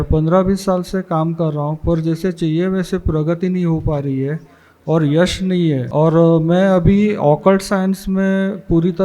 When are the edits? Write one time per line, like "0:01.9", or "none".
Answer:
0:05.8